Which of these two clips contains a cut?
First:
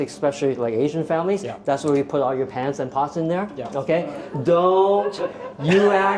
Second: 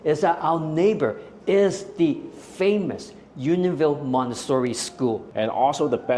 second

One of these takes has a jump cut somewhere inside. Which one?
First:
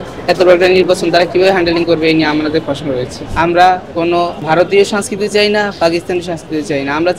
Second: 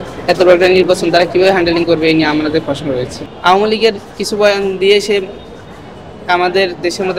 first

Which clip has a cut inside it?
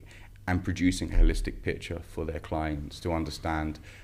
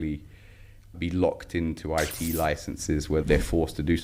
second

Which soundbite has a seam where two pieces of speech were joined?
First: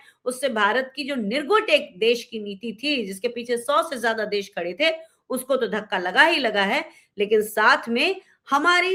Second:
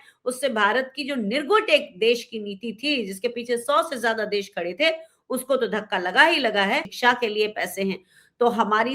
second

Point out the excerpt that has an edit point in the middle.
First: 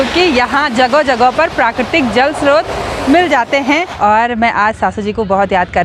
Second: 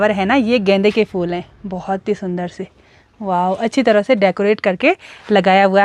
first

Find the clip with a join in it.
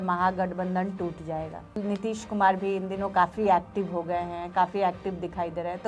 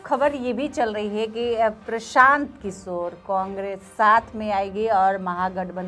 first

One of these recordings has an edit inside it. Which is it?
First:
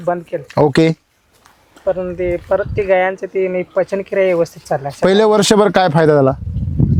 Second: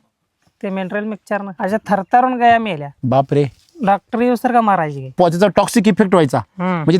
second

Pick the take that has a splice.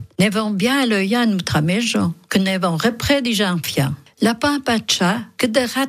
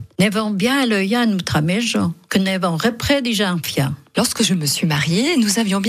first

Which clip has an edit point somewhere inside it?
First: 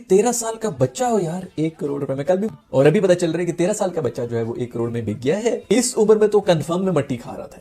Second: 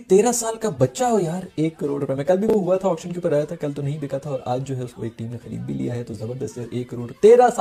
first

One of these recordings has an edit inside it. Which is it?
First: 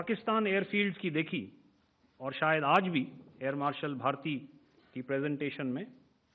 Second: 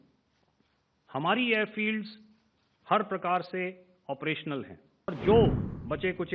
second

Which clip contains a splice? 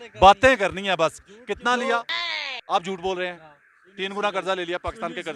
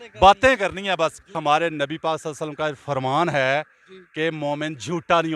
second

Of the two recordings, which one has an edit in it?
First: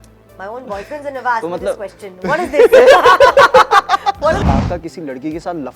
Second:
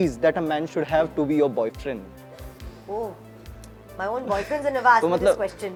first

